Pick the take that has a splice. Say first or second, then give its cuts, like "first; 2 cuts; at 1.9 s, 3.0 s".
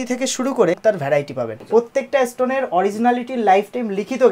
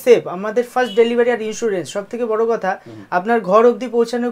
first; 1 cut; at 1.0 s